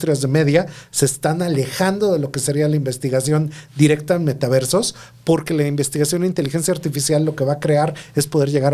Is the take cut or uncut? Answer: uncut